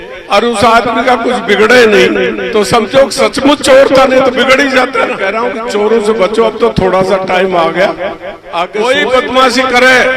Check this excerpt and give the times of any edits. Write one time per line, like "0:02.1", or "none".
0:05.2
0:08.7